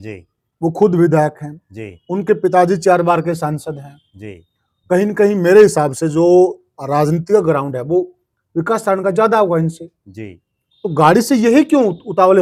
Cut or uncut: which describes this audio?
uncut